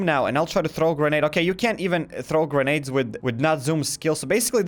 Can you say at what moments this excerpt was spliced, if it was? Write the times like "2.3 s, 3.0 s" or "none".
none